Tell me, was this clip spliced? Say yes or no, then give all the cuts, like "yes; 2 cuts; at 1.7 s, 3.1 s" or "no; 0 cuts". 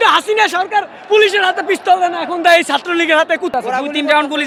no; 0 cuts